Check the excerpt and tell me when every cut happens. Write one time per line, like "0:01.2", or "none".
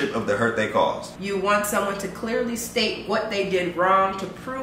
0:01.1